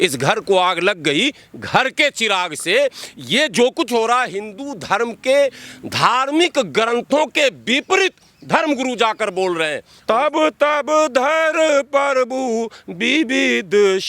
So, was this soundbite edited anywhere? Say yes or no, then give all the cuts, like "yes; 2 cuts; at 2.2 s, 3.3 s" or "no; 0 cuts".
yes; 1 cut; at 9.9 s